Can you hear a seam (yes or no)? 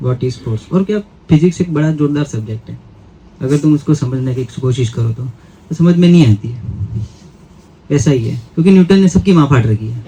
no